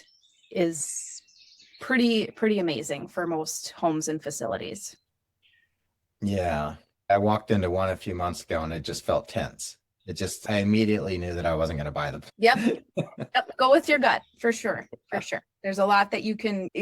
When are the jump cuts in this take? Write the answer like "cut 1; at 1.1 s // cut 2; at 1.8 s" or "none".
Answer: cut 1; at 10.4 s